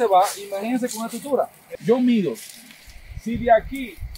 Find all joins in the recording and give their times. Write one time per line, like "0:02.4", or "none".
0:01.6